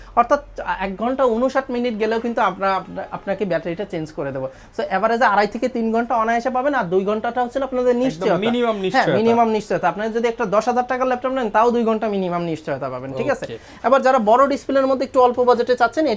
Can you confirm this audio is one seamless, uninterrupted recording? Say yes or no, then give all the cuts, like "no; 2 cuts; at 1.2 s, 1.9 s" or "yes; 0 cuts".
yes; 0 cuts